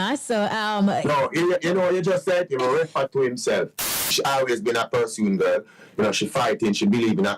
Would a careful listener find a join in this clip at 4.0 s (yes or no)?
yes